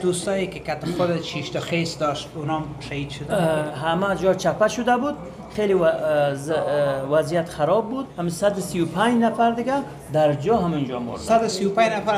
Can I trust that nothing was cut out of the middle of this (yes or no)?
no